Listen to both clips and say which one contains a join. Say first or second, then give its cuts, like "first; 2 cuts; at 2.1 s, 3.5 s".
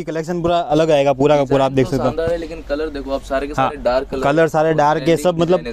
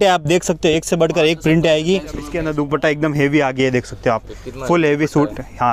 second; 1 cut; at 2.4 s